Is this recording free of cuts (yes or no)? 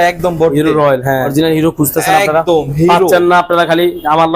no